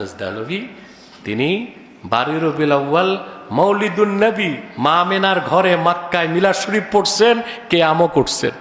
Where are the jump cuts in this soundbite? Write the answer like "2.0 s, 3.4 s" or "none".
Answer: none